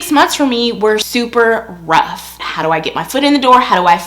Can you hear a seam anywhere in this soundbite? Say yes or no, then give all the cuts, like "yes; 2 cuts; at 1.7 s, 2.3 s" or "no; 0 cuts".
yes; 2 cuts; at 1.1 s, 2.3 s